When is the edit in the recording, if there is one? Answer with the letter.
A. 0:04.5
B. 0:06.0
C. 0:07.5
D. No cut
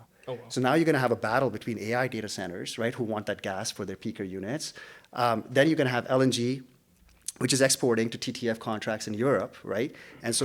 B